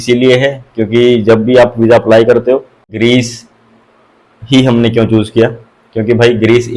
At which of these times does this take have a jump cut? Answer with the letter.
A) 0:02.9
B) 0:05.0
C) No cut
A